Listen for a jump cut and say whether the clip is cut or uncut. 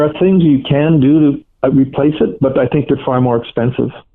uncut